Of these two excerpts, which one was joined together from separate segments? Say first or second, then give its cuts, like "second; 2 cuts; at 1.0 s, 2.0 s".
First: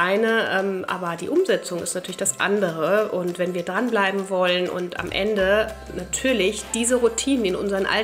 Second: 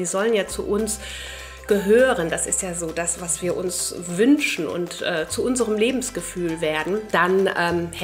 second; 1 cut; at 7.0 s